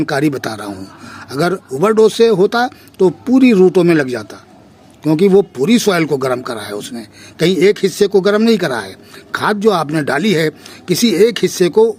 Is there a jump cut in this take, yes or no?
no